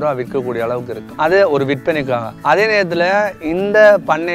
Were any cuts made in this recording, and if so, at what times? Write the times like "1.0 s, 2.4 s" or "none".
1.0 s, 2.3 s